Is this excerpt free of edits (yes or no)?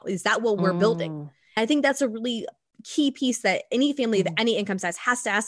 yes